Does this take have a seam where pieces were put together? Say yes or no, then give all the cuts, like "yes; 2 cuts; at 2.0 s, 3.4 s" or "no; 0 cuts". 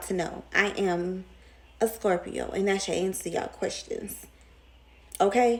no; 0 cuts